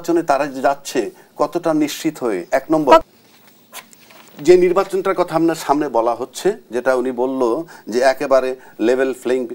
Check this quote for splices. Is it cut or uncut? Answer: cut